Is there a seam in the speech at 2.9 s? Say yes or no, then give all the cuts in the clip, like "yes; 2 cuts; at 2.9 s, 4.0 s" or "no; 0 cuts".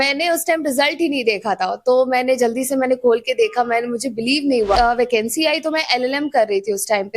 no; 1 cut; at 4.7 s